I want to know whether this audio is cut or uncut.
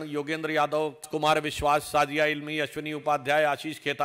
cut